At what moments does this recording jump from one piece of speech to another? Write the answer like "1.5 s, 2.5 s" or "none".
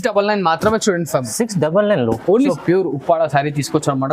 2.5 s